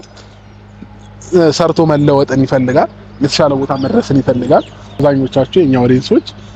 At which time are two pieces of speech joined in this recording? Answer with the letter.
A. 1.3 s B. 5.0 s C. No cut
B